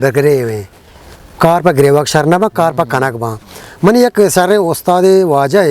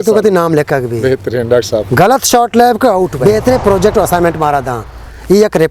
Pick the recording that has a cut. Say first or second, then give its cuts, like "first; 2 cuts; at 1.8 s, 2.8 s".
second; 1 cut; at 3.2 s